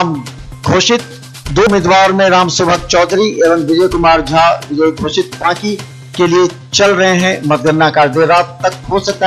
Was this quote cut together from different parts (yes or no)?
yes